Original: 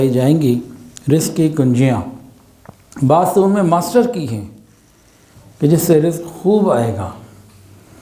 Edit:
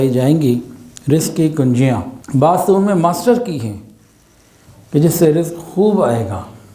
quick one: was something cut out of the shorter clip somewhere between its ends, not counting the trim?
yes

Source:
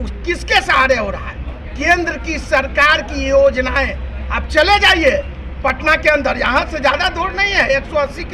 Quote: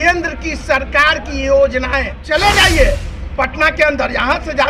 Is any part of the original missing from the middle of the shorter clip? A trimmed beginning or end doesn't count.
yes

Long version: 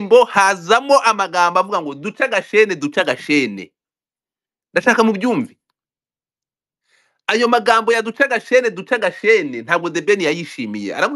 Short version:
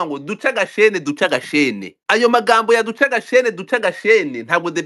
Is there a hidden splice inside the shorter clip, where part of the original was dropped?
yes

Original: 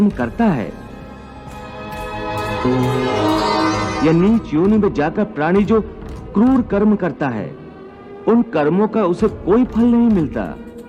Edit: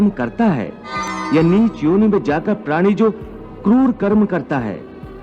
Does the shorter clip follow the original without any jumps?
no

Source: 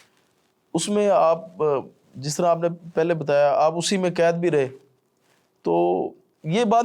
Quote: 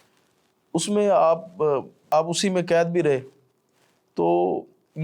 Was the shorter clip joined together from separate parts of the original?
yes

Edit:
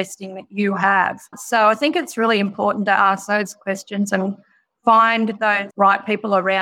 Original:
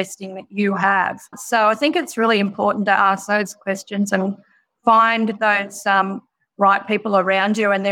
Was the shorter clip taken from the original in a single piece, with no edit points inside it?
no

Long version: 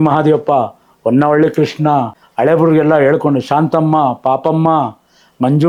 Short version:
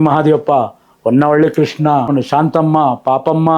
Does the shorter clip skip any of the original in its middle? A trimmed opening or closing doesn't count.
yes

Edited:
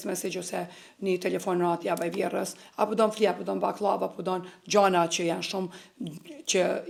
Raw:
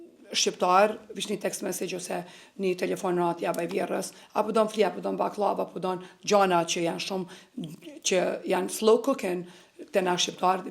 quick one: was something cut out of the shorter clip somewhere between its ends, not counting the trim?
no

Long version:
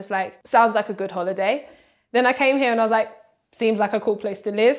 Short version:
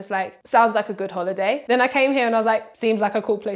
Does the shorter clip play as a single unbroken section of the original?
no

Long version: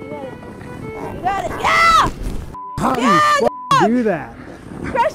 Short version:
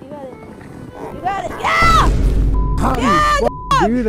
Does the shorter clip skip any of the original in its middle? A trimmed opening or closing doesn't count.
no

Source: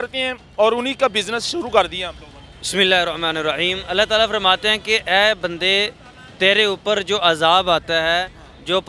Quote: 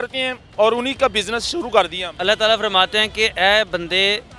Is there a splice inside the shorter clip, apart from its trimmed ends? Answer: yes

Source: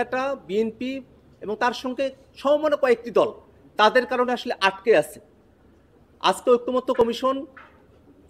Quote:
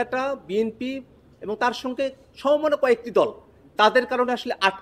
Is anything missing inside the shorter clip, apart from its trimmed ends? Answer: no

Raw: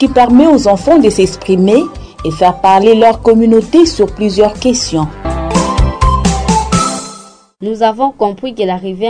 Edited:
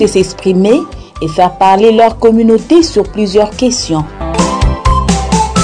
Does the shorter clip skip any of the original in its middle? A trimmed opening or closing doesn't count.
yes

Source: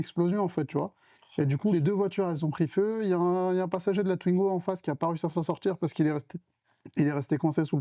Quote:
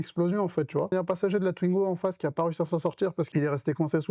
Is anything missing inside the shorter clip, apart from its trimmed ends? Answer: yes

